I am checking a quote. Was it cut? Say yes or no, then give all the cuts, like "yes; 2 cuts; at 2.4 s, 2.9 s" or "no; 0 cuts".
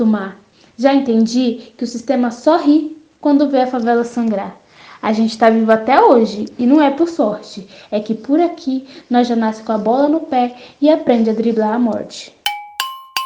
yes; 1 cut; at 12.2 s